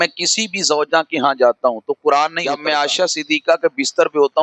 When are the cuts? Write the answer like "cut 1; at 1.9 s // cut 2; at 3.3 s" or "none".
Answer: cut 1; at 2.4 s